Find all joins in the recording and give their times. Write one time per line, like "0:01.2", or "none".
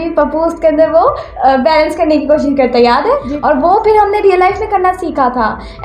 0:03.3